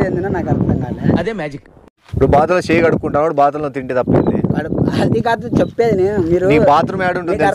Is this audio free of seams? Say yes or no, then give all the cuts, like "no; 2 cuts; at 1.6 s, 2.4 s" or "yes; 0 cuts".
no; 1 cut; at 1.0 s